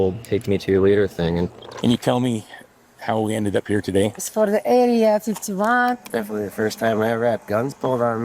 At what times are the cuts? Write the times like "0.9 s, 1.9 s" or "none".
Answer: 1.5 s, 4.3 s, 5.9 s